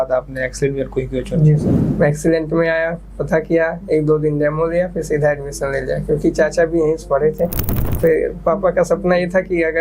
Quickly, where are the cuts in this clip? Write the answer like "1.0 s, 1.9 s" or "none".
1.8 s, 7.8 s